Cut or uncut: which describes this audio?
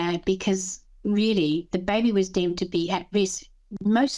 cut